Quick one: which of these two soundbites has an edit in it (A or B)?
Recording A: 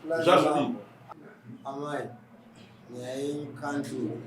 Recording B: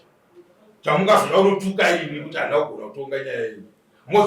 A